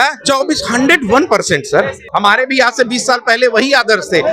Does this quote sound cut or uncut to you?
cut